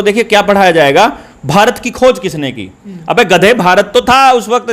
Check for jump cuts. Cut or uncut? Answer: uncut